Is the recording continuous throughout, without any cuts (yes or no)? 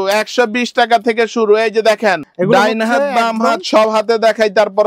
no